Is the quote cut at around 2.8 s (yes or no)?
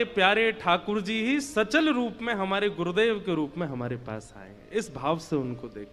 yes